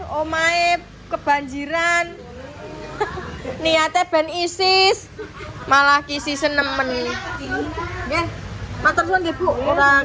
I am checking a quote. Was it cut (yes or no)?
no